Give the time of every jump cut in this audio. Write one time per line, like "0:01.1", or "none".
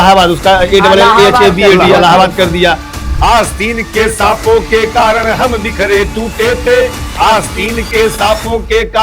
0:02.9